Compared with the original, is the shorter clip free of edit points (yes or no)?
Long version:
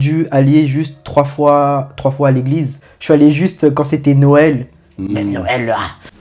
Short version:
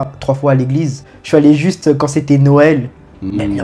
yes